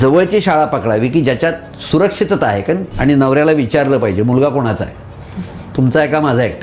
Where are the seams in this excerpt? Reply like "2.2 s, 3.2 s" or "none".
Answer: 2.9 s